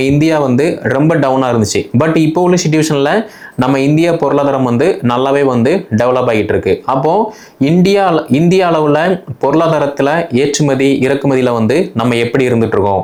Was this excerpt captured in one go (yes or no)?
yes